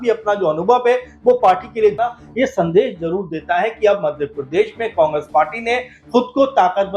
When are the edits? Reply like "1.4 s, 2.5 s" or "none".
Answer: 2.0 s